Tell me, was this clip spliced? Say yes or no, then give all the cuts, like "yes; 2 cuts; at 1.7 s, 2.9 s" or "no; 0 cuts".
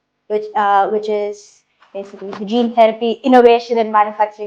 no; 0 cuts